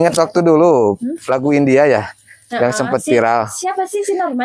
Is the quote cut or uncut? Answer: uncut